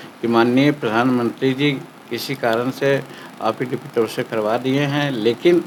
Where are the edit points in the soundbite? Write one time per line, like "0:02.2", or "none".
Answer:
none